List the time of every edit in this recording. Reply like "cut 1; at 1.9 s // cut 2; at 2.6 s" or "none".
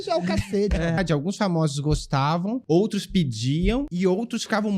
cut 1; at 1.0 s // cut 2; at 2.6 s // cut 3; at 3.9 s